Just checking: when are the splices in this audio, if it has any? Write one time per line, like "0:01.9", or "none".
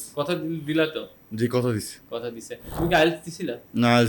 0:02.7